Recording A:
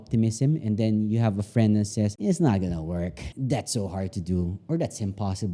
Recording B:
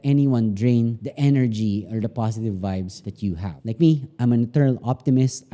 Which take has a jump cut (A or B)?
B